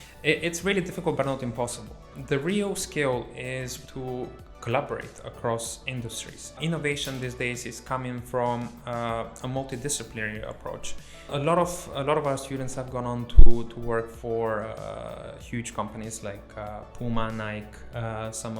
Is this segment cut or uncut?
cut